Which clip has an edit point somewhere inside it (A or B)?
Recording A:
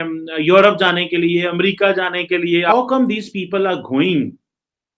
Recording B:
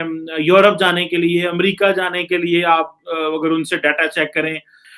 A